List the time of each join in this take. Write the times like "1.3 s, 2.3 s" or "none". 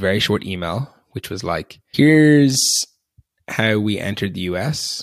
1.8 s